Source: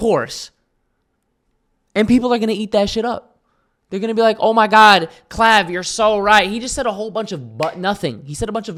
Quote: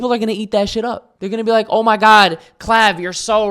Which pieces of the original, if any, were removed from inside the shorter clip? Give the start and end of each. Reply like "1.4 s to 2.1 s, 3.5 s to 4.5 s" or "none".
3.3 s to 3.8 s